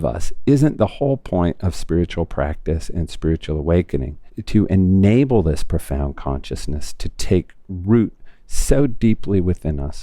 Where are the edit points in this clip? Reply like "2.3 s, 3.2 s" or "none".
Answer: 4.3 s